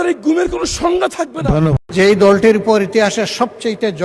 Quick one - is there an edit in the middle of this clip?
yes; 1 cut; at 1.8 s

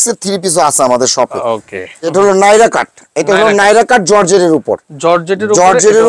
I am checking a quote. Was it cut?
yes; 1 cut; at 2.0 s

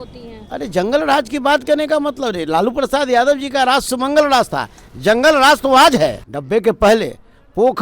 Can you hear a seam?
yes; 1 cut; at 6.3 s

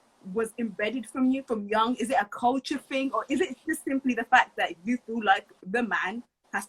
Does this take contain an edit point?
no; 0 cuts

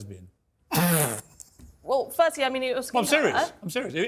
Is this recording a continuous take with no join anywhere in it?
yes; 0 cuts

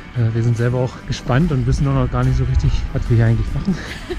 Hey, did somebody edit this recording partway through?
yes; 2 cuts; at 1.1 s, 2.8 s

